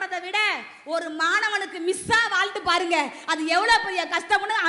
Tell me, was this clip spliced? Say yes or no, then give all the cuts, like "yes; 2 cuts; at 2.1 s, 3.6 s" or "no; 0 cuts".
no; 0 cuts